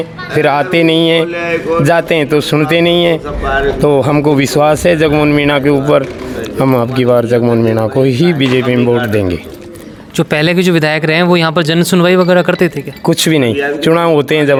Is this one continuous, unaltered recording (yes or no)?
yes